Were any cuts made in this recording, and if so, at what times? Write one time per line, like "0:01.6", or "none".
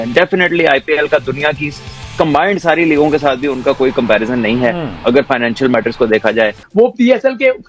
0:06.6

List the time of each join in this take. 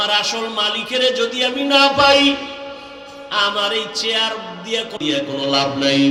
none

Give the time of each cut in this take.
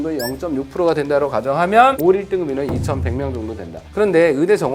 0:02.0

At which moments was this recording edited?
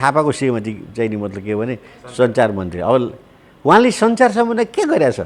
none

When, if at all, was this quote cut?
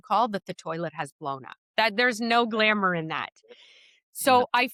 none

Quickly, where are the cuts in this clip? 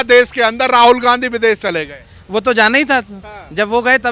none

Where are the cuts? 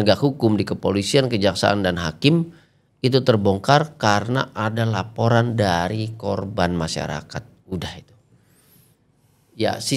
none

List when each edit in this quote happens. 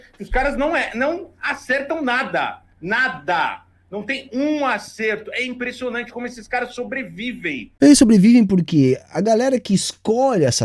0:07.6

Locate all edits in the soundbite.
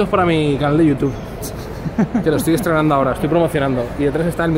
none

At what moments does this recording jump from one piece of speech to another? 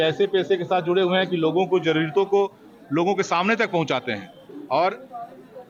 none

